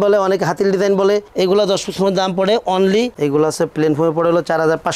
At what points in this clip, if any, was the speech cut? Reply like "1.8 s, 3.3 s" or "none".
3.1 s

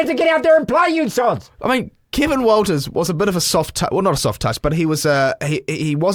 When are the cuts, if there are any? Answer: none

